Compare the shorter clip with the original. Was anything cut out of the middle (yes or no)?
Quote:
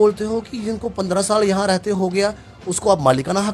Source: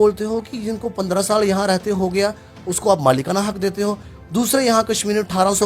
no